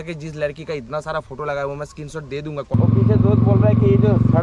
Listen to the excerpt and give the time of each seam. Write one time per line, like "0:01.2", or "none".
0:02.7